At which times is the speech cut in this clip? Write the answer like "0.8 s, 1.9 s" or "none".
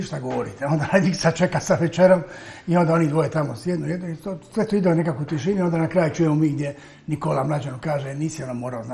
none